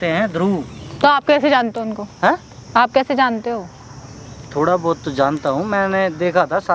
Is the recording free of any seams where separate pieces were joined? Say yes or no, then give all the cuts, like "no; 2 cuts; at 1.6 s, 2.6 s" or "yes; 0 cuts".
yes; 0 cuts